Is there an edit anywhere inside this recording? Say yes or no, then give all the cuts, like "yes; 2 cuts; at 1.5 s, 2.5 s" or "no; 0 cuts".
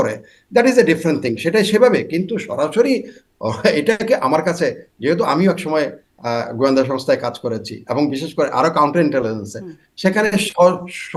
no; 0 cuts